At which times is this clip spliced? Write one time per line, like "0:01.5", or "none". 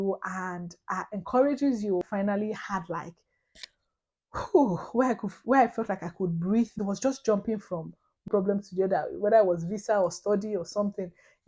0:02.1
0:06.8
0:08.3

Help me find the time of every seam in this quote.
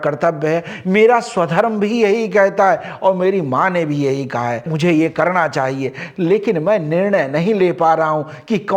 none

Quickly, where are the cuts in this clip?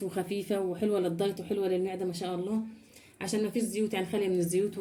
none

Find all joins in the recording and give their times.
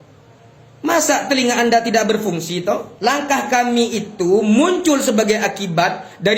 0:02.9

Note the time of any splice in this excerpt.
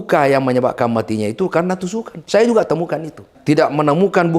0:02.1
0:03.3

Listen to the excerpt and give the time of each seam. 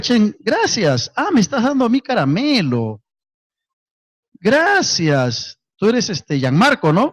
0:01.7

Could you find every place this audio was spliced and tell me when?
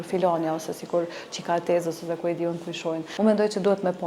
0:03.1

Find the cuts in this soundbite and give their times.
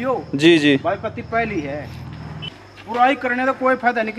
0:02.6

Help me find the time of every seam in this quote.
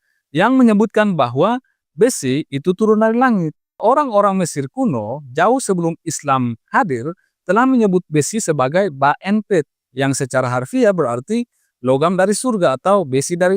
0:03.8

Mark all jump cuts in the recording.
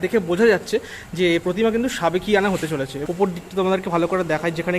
0:02.9

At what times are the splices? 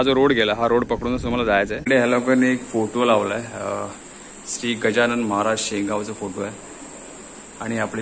0:01.8

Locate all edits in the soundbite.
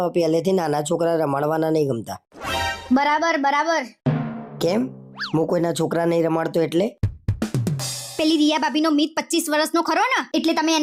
none

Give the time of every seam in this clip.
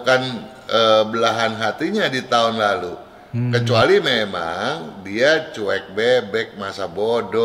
none

